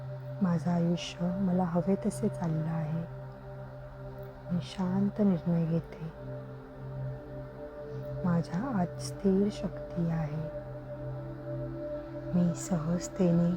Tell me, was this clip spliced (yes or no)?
yes